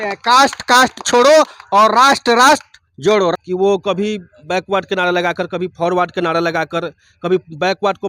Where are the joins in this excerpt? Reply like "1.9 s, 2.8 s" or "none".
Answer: 3.3 s